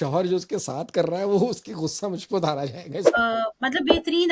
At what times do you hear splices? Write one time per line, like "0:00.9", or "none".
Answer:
0:03.1